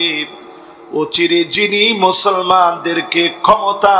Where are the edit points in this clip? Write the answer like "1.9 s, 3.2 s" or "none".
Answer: none